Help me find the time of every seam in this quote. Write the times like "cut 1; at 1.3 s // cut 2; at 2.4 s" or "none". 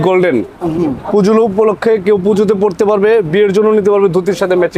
none